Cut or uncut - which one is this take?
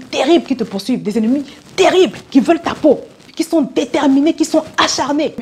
cut